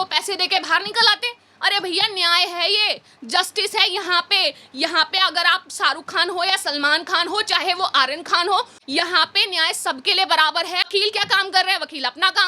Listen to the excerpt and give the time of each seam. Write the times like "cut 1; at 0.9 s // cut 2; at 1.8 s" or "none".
cut 1; at 10.9 s